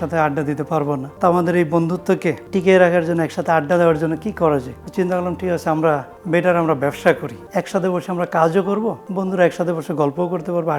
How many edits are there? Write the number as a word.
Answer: six